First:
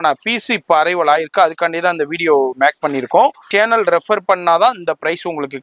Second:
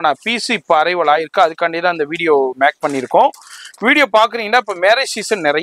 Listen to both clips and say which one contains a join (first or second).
first